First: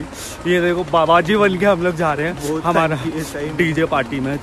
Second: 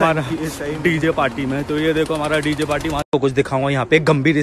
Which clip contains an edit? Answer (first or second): second